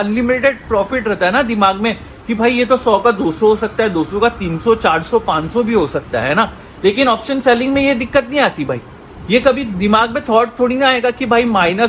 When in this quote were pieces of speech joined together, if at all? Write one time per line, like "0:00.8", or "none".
none